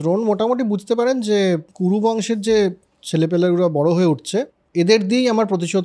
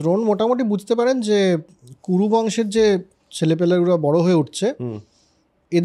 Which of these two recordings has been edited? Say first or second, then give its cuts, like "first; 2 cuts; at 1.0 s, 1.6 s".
first; 2 cuts; at 1.7 s, 4.6 s